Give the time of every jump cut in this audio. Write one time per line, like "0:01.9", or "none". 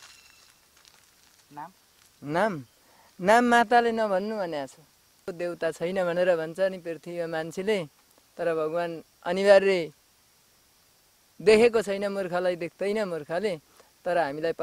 0:05.3